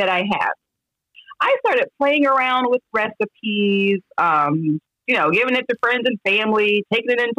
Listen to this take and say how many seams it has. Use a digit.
1